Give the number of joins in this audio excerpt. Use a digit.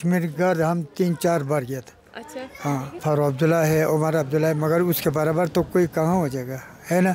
1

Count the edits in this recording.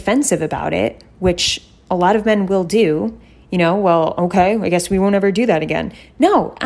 0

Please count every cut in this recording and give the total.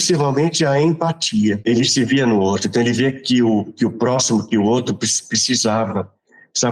1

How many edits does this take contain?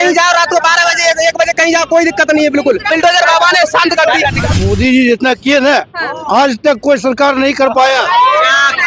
2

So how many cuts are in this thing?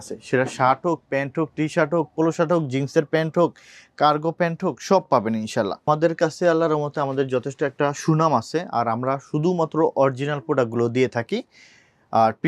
1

